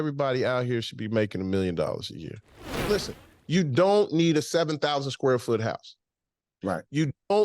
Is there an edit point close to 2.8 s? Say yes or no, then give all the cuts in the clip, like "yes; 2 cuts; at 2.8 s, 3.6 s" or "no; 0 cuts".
yes; 1 cut; at 2.8 s